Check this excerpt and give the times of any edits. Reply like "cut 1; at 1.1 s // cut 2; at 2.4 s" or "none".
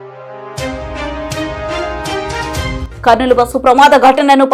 cut 1; at 2.9 s